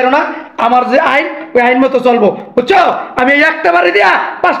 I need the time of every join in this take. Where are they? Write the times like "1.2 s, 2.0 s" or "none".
none

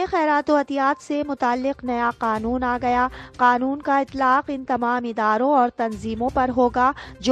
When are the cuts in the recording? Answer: none

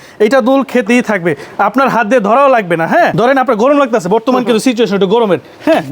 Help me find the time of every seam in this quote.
none

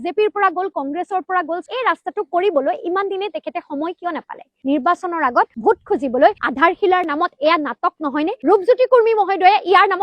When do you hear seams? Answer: 1.6 s, 4.5 s

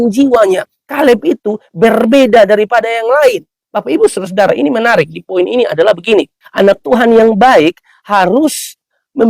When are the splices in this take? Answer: 6.4 s

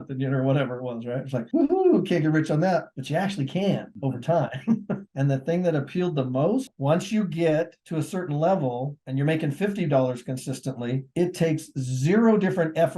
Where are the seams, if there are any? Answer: 6.7 s

